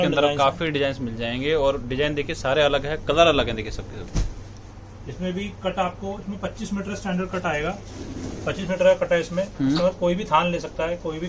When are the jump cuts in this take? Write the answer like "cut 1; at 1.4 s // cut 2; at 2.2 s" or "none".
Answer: none